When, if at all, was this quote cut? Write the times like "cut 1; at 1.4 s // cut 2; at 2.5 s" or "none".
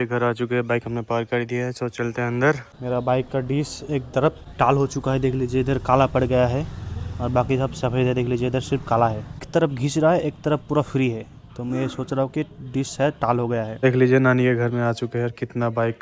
cut 1; at 2.7 s // cut 2; at 4.4 s // cut 3; at 9.5 s // cut 4; at 13.7 s